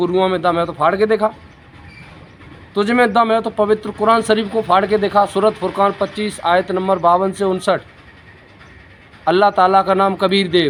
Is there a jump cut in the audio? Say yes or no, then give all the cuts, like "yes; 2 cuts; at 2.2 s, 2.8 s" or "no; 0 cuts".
no; 0 cuts